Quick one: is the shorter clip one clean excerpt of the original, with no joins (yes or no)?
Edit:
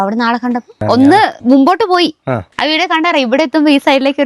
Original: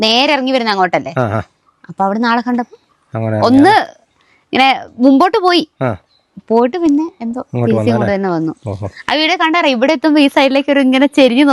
no